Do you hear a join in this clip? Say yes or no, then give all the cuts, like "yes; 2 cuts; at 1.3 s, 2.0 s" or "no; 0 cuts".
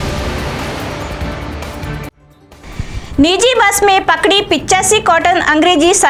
no; 0 cuts